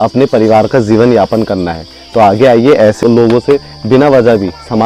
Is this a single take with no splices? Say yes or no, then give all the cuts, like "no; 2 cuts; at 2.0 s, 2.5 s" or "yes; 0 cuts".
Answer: no; 1 cut; at 3.0 s